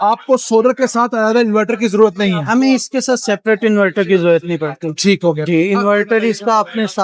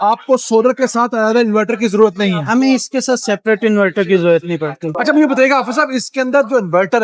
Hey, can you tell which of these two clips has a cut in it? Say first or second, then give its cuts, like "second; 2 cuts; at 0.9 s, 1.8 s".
second; 1 cut; at 5.0 s